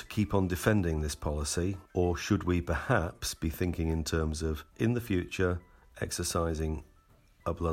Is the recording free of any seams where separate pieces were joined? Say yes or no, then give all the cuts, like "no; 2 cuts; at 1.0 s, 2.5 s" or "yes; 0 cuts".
no; 2 cuts; at 1.8 s, 4.6 s